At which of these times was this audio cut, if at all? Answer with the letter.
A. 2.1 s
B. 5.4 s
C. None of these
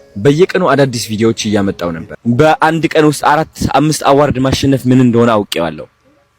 A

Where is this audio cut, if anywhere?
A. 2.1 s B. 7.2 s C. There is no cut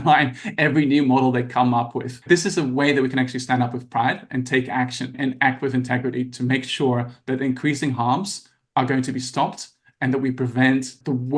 A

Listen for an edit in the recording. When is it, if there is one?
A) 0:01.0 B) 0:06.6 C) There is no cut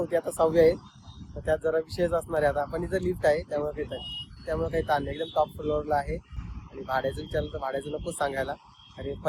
C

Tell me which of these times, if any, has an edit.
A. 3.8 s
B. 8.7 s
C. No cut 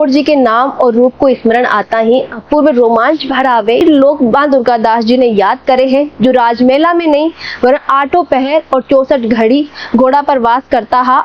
A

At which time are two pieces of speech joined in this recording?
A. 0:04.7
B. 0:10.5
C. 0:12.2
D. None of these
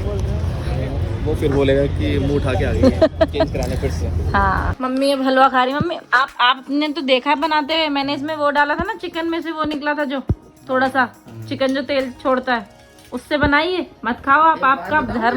A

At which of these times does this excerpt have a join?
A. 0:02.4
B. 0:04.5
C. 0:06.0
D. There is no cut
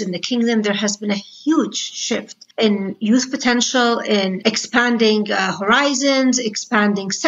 A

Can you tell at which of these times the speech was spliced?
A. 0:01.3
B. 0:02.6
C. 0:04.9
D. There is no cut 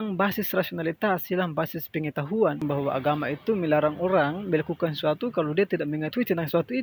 B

